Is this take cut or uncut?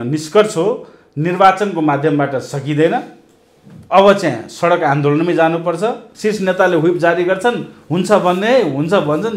cut